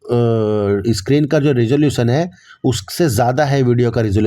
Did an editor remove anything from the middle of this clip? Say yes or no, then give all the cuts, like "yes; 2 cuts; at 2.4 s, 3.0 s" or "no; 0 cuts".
no; 0 cuts